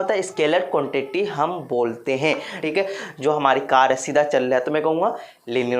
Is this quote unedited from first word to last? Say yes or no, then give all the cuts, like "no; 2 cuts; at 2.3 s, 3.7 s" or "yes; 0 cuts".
no; 1 cut; at 2.5 s